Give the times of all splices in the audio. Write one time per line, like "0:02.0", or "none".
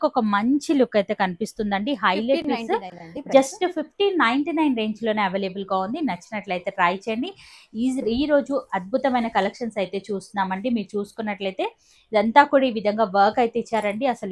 none